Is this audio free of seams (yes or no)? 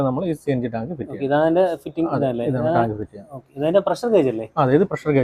yes